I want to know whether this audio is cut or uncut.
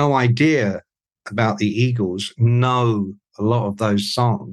uncut